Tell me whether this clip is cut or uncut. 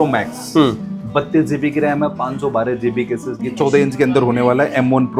cut